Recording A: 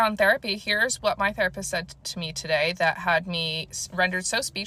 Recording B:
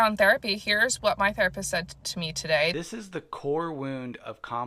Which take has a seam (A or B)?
B